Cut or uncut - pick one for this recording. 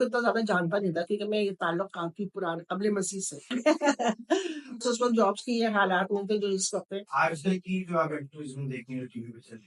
cut